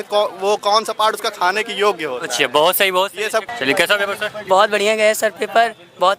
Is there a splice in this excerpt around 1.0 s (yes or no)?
no